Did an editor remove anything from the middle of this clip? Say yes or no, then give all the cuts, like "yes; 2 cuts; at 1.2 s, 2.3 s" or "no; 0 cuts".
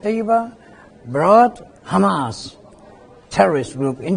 no; 0 cuts